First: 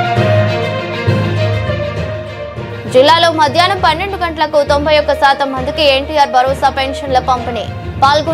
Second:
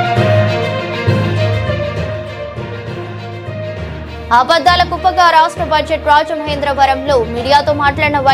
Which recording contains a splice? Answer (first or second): first